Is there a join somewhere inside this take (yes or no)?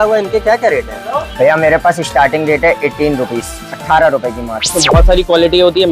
yes